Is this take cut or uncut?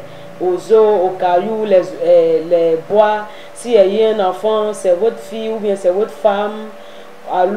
uncut